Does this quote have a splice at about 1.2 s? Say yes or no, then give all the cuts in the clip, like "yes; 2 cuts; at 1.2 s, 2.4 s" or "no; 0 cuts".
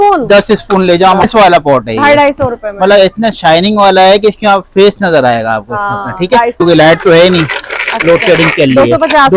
yes; 2 cuts; at 1.2 s, 6.6 s